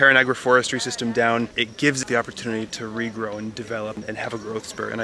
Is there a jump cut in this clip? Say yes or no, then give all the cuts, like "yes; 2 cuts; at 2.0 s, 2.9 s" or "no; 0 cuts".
yes; 2 cuts; at 2.0 s, 4.0 s